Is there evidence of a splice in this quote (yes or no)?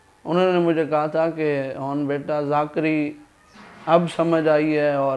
no